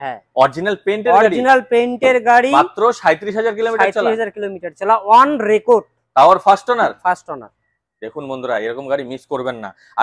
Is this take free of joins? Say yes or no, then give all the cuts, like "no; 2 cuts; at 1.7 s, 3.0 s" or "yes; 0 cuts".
yes; 0 cuts